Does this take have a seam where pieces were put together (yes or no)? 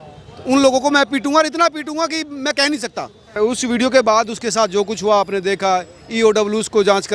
yes